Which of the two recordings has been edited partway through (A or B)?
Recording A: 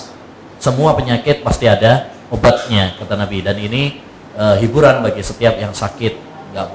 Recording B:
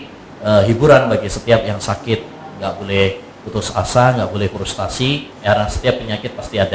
B